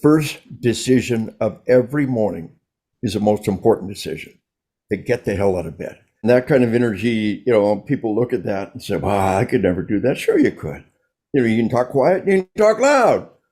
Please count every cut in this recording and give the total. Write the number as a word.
one